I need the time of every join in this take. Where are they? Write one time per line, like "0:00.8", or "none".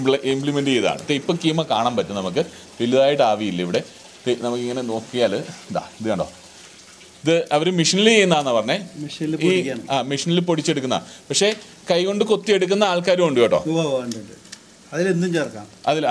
none